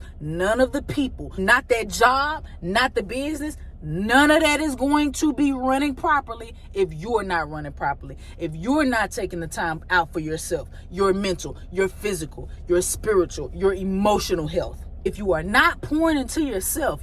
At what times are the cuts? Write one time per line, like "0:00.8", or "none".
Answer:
0:01.3
0:15.1